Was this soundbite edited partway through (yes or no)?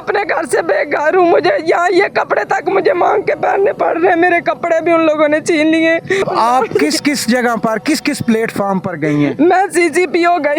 yes